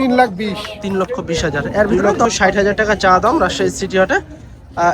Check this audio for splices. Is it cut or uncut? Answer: cut